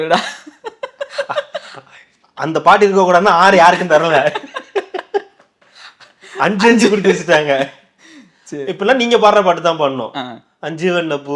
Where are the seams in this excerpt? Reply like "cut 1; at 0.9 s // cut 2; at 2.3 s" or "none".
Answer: none